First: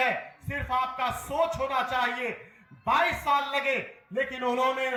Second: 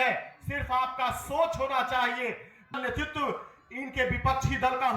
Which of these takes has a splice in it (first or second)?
second